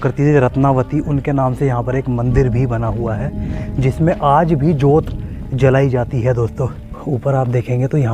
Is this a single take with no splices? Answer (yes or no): no